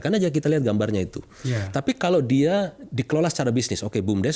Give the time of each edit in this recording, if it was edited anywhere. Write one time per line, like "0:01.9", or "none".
none